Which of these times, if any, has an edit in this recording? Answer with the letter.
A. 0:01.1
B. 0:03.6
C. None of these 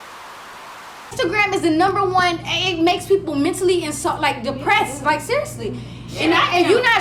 A